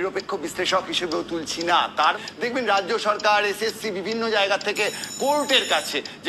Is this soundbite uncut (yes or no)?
no